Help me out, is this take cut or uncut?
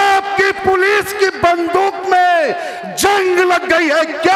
uncut